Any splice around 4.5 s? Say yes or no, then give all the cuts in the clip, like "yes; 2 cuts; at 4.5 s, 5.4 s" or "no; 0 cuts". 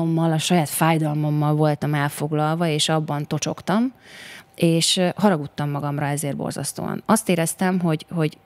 no; 0 cuts